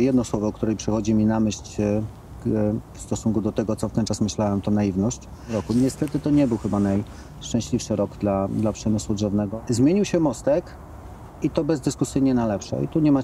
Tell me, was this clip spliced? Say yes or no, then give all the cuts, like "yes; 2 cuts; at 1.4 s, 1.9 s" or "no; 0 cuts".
yes; 2 cuts; at 5.6 s, 9.5 s